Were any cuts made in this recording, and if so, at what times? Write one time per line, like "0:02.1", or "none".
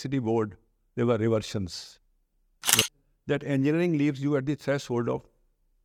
0:02.8